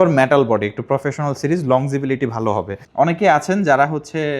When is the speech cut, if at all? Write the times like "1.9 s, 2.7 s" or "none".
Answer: 2.8 s